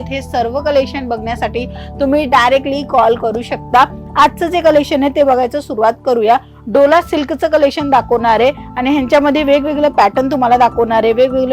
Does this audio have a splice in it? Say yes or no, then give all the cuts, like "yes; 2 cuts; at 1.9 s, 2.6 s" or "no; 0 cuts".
no; 0 cuts